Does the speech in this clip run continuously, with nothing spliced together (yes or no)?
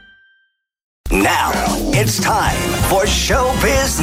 no